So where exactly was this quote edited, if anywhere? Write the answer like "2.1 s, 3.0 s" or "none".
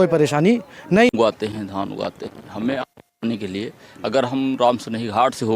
1.1 s